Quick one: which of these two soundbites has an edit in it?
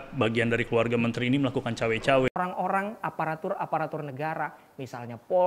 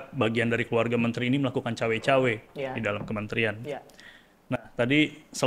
first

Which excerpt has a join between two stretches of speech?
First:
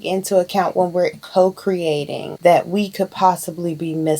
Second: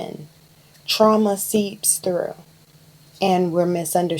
first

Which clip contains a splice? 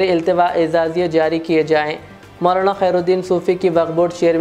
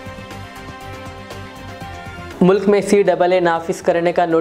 second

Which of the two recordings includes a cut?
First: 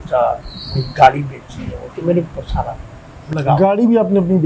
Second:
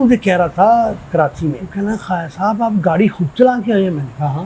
second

